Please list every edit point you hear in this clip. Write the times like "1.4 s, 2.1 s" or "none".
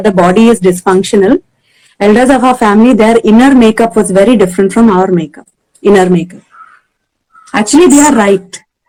none